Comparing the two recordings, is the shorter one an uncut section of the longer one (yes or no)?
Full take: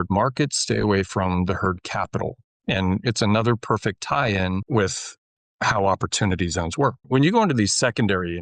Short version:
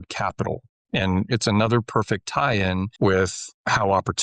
no